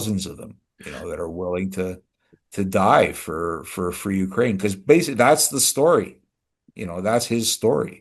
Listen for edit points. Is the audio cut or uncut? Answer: uncut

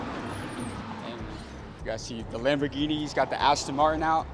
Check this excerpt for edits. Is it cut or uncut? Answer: cut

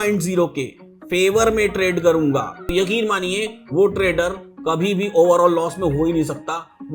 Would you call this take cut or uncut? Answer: cut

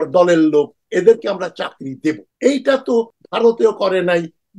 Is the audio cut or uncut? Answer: cut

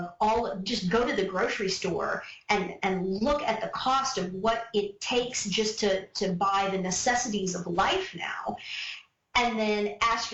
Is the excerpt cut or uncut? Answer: uncut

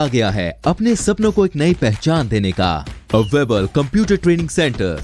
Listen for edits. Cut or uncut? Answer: uncut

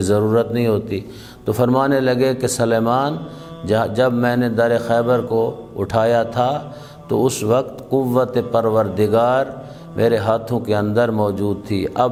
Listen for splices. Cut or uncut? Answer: uncut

